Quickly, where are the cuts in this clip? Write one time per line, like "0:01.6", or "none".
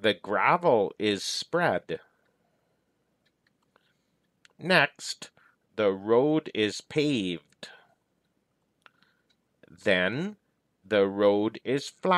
0:03.3
0:08.6